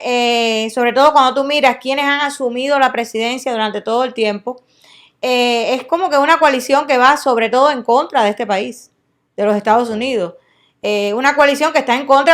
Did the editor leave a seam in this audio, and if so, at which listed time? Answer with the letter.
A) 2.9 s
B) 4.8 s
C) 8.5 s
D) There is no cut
D